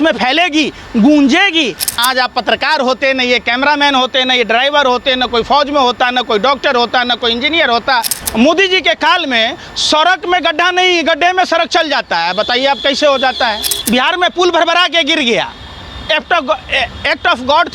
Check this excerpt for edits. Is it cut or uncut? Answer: cut